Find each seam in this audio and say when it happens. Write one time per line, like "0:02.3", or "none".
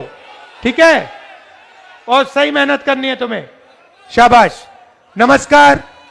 none

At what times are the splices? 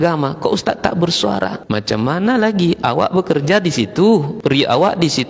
0:01.6
0:04.3

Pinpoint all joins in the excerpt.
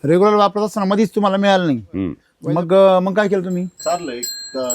0:03.8

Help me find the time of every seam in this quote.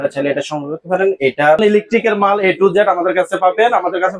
0:01.6

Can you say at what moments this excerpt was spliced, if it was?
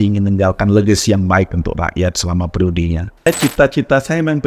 0:03.3

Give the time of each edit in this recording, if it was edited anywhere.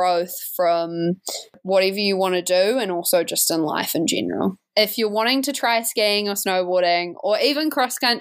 0:01.6
0:04.6

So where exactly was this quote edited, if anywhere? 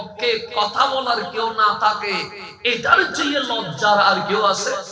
none

